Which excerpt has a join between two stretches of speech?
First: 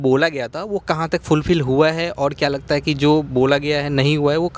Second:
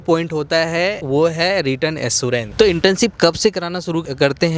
second; 2 cuts; at 1.0 s, 2.5 s

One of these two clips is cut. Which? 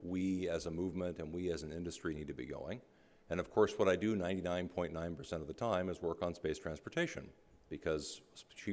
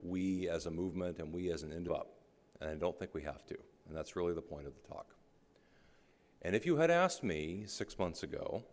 first; 1 cut; at 1.9 s

